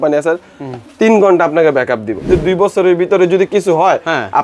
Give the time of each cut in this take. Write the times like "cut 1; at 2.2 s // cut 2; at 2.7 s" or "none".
cut 1; at 2.3 s